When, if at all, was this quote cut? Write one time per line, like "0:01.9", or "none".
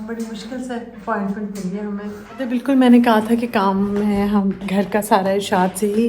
0:02.6